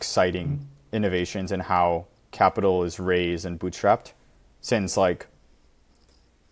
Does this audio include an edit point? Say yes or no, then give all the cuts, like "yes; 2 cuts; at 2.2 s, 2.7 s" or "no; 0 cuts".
no; 0 cuts